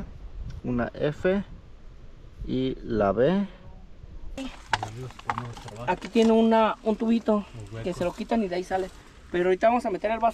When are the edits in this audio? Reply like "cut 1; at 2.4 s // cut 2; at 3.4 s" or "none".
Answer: cut 1; at 4.4 s